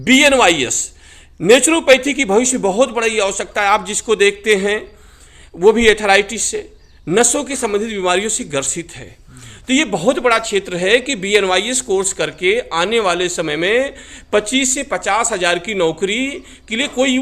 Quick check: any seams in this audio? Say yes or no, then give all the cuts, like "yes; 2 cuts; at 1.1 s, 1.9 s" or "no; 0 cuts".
no; 0 cuts